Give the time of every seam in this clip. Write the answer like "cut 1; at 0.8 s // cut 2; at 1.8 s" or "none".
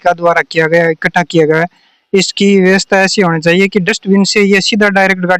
none

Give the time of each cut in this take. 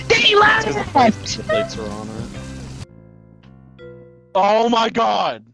none

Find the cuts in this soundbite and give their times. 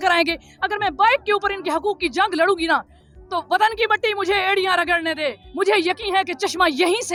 none

